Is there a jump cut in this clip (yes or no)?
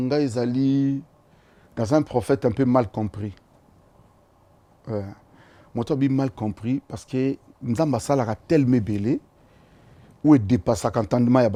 no